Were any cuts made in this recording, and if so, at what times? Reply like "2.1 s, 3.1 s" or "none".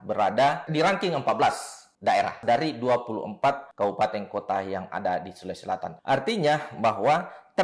2.4 s, 3.7 s